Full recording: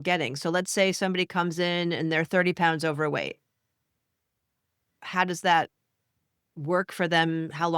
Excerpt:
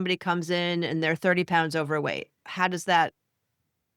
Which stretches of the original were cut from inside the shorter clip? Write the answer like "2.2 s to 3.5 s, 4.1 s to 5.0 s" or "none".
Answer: 3.5 s to 4.9 s